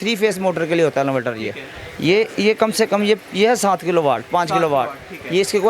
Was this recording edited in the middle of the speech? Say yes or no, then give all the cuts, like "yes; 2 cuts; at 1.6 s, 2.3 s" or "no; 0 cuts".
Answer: no; 0 cuts